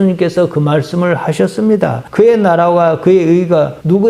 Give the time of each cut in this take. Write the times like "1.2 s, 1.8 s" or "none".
2.0 s